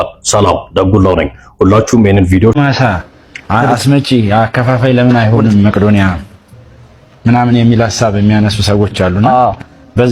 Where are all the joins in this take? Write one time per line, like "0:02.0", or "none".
0:02.6